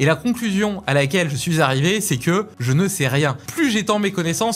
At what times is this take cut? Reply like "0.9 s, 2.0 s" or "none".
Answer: 2.6 s, 3.4 s